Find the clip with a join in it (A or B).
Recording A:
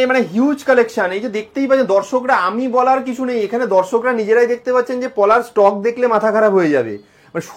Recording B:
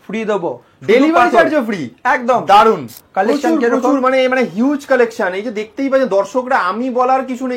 B